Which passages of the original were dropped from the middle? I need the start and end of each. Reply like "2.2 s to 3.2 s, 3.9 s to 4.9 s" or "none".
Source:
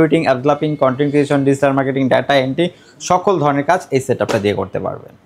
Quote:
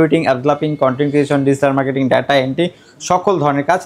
none